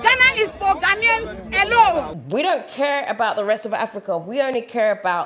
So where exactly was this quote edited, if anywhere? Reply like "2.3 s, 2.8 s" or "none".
2.2 s